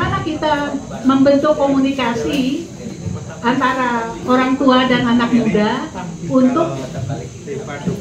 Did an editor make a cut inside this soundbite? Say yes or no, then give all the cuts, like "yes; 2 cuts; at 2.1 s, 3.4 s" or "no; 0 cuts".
no; 0 cuts